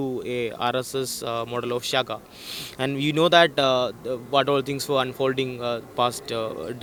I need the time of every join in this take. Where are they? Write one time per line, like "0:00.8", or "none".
none

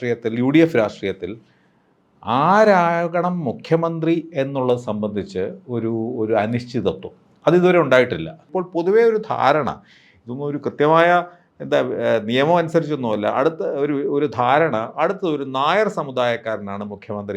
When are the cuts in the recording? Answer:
0:08.4

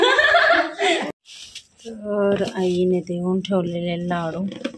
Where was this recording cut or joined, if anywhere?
0:01.1

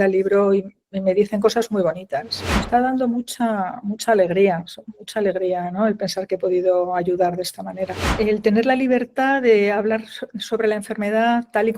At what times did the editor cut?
0:02.6
0:08.1

